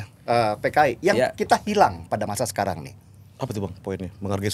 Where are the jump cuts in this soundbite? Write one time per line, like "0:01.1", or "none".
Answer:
none

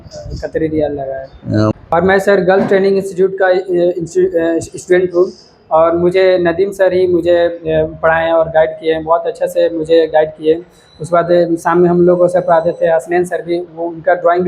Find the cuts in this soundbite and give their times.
0:01.7

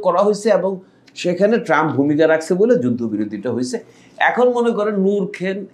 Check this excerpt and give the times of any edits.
none

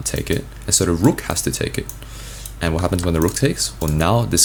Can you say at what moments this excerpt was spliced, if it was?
none

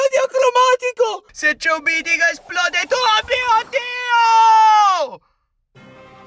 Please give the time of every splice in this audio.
0:01.3

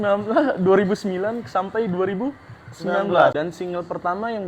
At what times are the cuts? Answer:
0:03.3

